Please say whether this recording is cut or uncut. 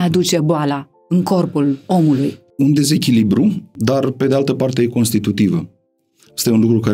cut